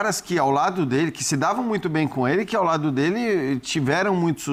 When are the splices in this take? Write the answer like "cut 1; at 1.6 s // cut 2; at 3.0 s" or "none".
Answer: none